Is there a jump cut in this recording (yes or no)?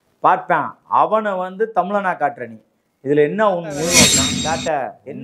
yes